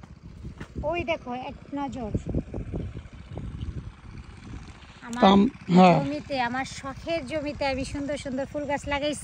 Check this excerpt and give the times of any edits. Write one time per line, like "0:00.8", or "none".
none